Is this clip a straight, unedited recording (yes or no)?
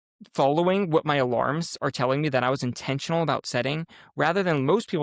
yes